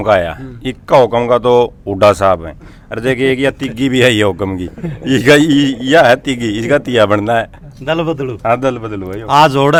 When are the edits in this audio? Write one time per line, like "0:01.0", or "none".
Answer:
none